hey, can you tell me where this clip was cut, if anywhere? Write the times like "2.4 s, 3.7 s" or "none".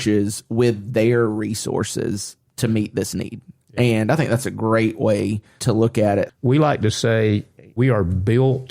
5.5 s, 6.3 s, 7.8 s